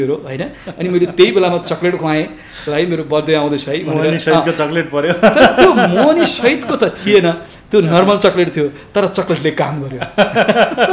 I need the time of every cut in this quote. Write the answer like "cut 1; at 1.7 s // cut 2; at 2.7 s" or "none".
none